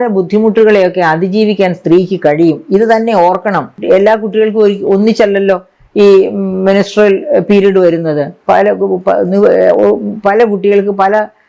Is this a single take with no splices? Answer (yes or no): no